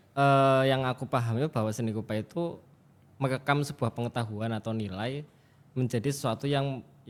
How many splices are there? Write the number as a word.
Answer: zero